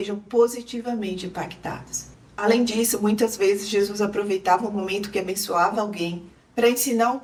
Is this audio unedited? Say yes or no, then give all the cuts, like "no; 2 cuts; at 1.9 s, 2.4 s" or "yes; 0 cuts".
yes; 0 cuts